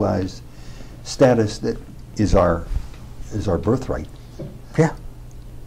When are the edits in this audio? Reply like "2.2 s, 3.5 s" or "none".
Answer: 1.8 s, 4.4 s